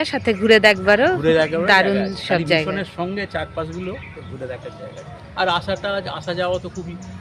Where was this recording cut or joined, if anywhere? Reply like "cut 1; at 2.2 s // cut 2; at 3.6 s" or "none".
none